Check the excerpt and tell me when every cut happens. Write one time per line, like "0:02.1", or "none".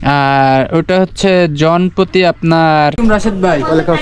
0:03.0